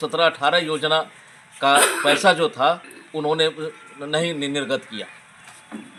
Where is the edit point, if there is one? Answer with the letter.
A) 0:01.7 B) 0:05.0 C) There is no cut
C